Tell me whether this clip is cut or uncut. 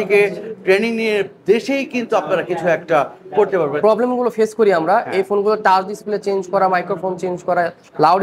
cut